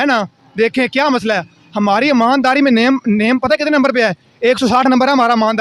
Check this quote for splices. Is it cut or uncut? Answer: uncut